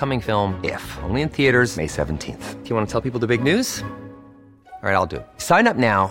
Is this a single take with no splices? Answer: yes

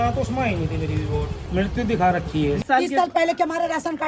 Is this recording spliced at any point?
yes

